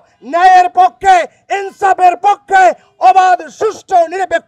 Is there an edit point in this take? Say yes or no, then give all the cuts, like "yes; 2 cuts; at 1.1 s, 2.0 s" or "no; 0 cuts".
no; 0 cuts